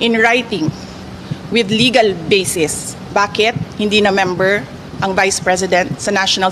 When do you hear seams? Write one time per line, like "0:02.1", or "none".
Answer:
none

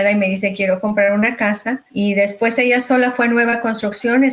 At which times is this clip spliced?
0:01.9

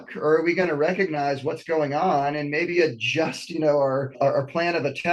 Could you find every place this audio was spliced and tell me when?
0:04.1

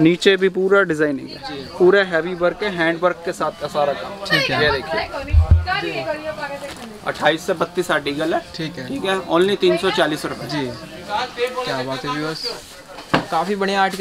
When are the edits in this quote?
none

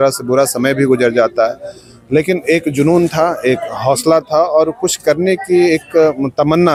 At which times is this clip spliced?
none

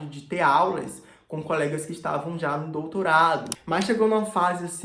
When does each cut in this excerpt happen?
0:03.5

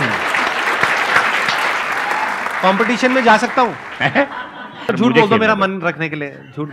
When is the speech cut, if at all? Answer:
0:01.8
0:04.8

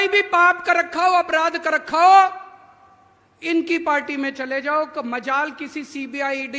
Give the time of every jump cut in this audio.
none

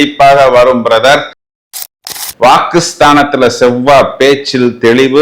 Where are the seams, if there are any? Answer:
0:01.8

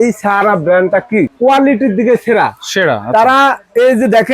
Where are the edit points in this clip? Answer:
0:01.3

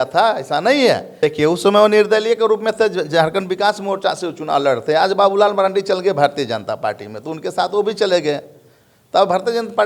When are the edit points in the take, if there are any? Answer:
0:01.1

